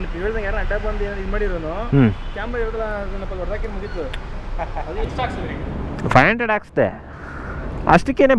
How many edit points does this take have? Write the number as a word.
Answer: one